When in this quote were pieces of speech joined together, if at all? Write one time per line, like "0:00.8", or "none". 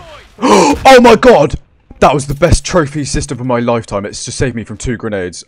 none